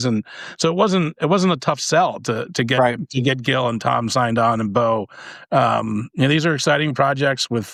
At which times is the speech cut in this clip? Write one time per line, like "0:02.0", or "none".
none